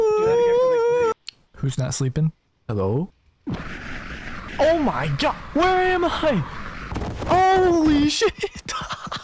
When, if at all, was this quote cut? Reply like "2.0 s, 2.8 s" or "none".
1.1 s